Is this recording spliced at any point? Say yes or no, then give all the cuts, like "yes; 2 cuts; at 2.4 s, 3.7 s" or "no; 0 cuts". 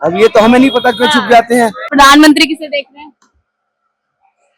yes; 1 cut; at 1.9 s